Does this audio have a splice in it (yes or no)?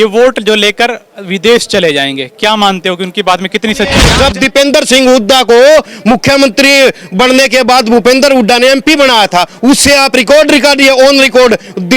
yes